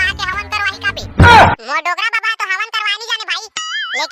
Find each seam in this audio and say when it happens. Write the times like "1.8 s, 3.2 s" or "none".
1.0 s, 1.6 s